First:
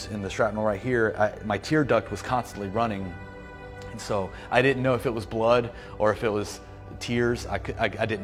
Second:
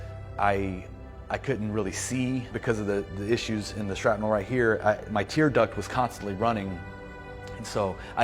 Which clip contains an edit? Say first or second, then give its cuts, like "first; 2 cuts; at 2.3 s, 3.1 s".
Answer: second; 1 cut; at 2.5 s